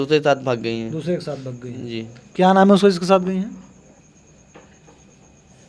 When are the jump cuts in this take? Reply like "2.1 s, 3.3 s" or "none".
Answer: 4.0 s